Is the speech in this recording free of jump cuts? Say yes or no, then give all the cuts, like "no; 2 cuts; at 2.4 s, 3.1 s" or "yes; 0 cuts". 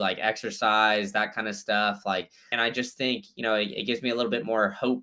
no; 1 cut; at 2.4 s